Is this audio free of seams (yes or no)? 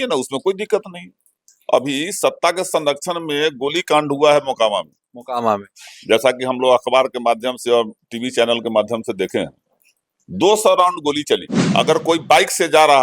no